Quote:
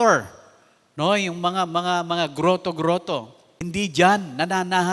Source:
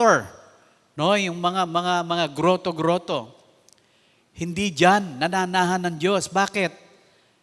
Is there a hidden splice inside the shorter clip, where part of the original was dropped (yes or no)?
yes